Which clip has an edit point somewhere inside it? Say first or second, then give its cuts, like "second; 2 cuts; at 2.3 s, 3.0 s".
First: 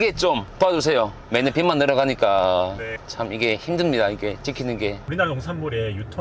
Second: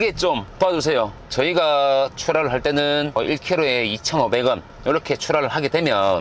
second; 1 cut; at 1.2 s